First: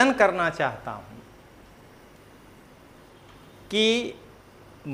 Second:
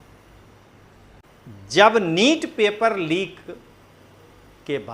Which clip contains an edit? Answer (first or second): second